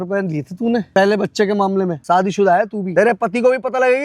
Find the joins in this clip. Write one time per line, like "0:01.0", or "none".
0:00.9
0:02.0
0:02.8